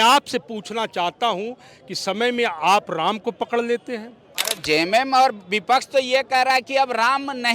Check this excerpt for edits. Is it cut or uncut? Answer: cut